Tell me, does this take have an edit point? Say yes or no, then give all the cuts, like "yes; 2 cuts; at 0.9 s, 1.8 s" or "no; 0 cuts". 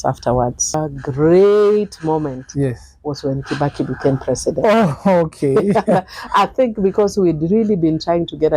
yes; 1 cut; at 0.9 s